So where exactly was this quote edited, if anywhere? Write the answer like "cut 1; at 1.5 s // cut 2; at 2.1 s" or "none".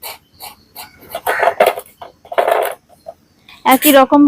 cut 1; at 1.1 s